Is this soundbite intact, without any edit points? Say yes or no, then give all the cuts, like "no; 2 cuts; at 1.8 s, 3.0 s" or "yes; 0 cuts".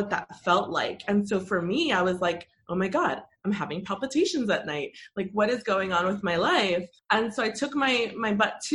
no; 1 cut; at 6.9 s